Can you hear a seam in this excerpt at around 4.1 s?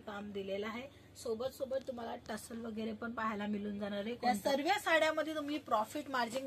yes; 1 cut; at 4.1 s

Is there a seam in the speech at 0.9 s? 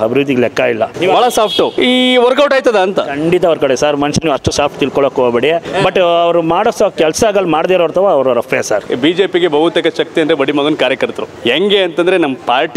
yes; 5 cuts; at 0.9 s, 1.7 s, 5.6 s, 8.9 s, 11.3 s

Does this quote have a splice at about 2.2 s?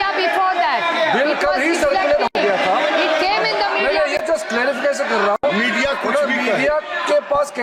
no; 0 cuts

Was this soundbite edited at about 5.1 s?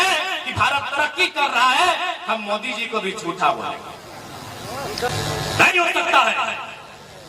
yes; 1 cut; at 5.1 s

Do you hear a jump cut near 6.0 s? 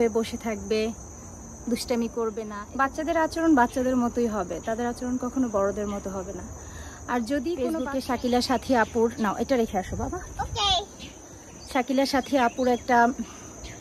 no; 2 cuts; at 2.6 s, 7.8 s

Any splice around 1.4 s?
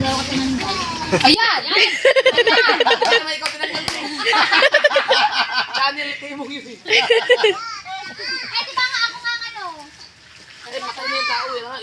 no; 0 cuts

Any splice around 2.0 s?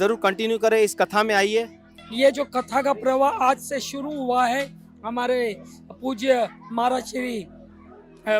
yes; 1 cut; at 2.0 s

